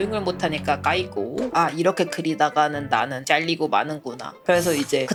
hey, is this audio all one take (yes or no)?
yes